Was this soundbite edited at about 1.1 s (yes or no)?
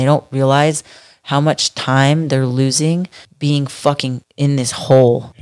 no